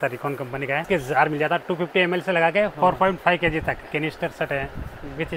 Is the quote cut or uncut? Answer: cut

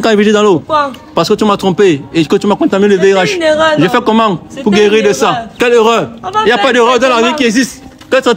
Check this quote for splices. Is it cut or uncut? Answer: uncut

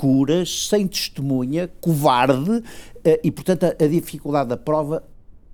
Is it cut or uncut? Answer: uncut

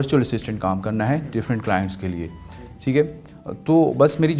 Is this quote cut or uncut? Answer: uncut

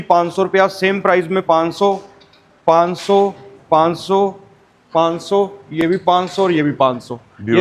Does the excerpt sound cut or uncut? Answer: uncut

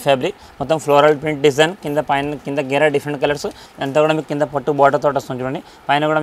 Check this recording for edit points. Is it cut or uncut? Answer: cut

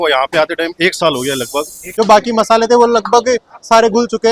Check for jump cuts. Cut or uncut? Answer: cut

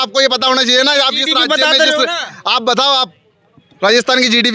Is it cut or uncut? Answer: uncut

